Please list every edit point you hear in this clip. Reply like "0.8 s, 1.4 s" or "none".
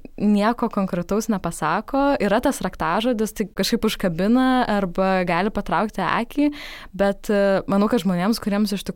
3.5 s, 7.7 s

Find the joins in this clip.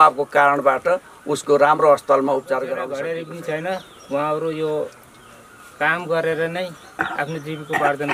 2.9 s

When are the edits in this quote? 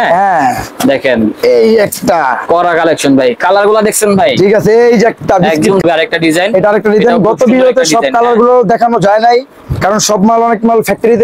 5.8 s

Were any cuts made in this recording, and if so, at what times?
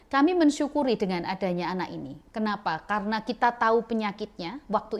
none

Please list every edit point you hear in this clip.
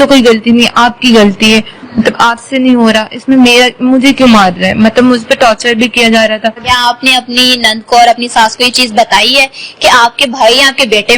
6.6 s

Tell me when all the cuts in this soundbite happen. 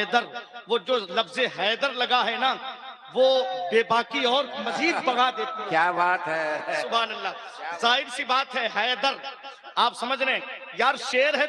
none

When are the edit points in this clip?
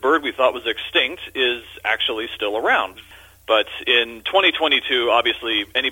2.9 s

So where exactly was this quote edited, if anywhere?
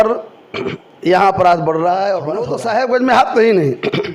2.5 s

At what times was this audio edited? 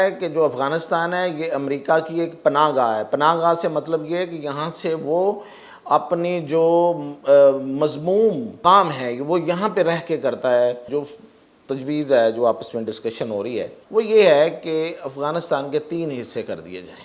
8.5 s, 10.9 s, 13.8 s

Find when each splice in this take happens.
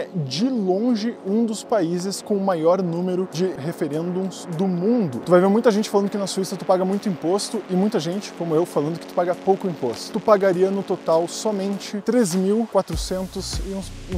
3.5 s, 5.2 s, 10.1 s, 11.9 s, 12.7 s

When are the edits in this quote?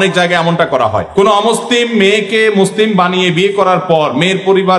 1.1 s

